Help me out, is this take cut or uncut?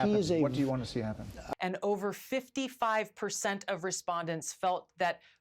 cut